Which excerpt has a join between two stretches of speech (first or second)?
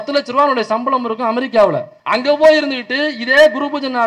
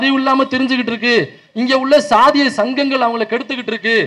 first